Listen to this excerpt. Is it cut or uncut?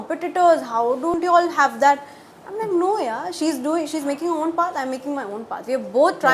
cut